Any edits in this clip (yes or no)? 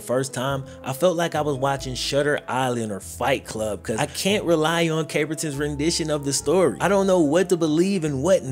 yes